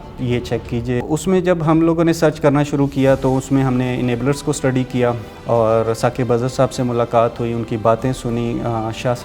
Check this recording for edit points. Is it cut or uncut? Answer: cut